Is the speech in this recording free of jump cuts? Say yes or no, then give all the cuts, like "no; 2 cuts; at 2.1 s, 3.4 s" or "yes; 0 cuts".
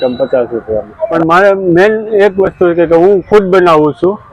no; 1 cut; at 1.1 s